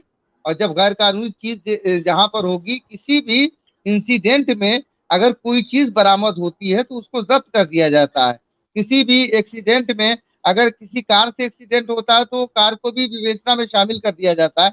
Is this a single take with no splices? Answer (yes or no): yes